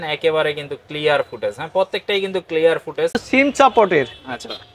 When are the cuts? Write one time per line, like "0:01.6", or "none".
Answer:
0:03.1